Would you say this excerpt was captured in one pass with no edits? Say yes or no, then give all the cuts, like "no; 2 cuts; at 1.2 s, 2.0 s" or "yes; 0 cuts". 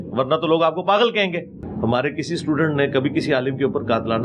no; 1 cut; at 1.6 s